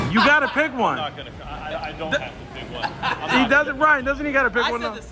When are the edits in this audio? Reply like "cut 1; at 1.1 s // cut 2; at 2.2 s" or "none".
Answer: none